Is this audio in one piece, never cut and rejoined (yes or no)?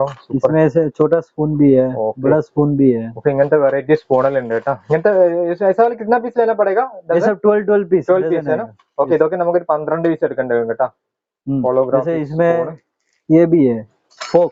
yes